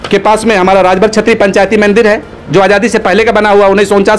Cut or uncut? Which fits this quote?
uncut